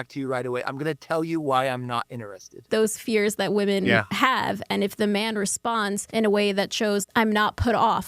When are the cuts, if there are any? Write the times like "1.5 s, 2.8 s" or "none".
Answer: 2.7 s, 6.0 s, 7.1 s